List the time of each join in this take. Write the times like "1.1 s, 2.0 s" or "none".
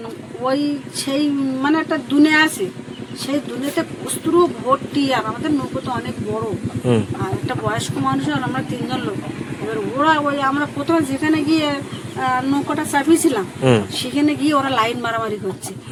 none